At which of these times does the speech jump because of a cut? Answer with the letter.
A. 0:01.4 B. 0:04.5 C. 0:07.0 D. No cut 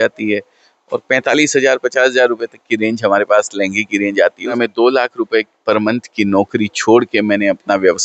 B